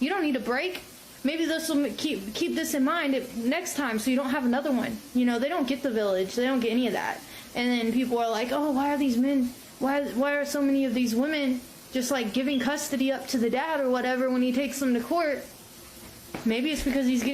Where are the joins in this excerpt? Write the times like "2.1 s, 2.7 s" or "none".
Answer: 5.4 s